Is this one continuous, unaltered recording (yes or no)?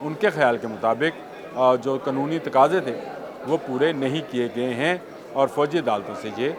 yes